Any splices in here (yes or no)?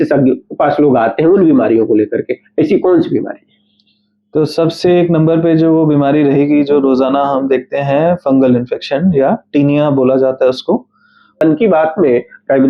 yes